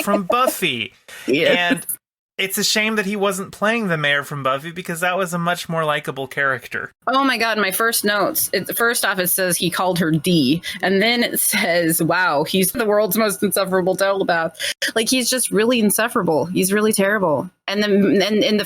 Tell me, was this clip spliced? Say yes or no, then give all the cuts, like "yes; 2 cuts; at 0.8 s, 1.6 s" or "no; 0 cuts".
yes; 1 cut; at 12.8 s